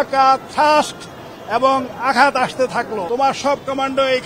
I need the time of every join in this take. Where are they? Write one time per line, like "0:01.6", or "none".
0:03.0